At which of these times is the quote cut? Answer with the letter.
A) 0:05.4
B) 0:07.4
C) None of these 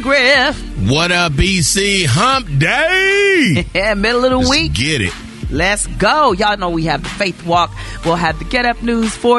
C